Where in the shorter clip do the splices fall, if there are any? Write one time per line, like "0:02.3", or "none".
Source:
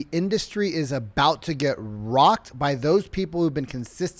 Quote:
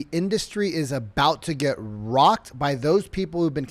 none